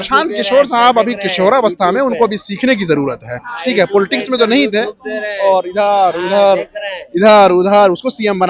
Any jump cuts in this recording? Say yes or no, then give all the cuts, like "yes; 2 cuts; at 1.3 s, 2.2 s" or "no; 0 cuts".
no; 0 cuts